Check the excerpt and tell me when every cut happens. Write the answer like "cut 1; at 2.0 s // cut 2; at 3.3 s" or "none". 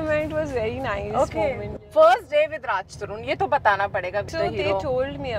cut 1; at 1.7 s // cut 2; at 4.3 s